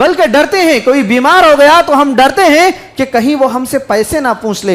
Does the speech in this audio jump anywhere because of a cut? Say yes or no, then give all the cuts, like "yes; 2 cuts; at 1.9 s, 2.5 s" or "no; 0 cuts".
no; 0 cuts